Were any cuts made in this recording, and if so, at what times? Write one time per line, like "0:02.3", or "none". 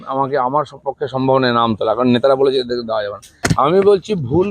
0:03.4